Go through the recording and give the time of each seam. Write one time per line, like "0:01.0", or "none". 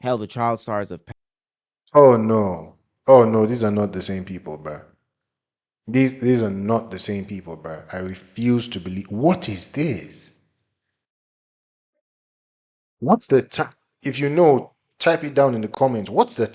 0:01.0